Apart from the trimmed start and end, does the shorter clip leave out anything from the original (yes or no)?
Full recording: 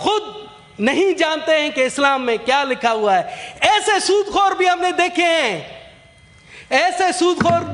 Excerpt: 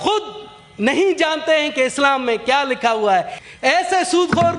yes